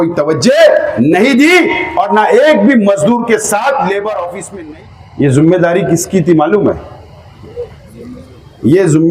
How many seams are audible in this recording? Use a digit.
1